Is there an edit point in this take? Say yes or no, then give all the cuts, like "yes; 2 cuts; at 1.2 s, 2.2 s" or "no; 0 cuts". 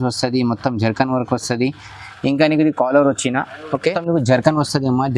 yes; 1 cut; at 4.0 s